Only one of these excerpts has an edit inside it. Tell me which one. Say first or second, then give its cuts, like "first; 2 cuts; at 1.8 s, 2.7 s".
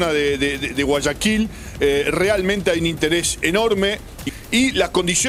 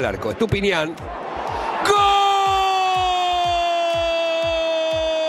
first; 1 cut; at 4.2 s